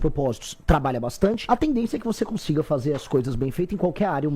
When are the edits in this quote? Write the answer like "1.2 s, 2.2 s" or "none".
1.4 s